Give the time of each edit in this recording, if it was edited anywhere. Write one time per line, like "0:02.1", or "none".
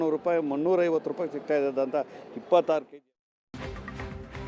0:03.4